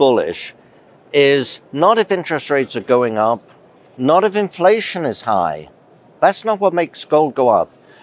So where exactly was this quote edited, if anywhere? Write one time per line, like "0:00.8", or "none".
none